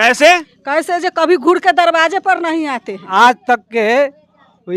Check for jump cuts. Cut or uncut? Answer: cut